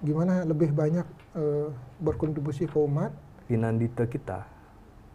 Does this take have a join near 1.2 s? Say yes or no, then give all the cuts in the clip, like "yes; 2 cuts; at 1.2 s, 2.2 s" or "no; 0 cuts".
no; 1 cut; at 3.3 s